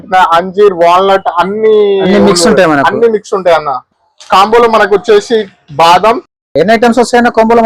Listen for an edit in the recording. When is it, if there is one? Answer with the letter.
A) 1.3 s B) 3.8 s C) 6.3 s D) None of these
B